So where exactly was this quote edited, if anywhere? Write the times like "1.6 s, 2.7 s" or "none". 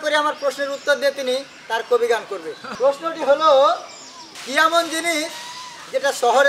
2.7 s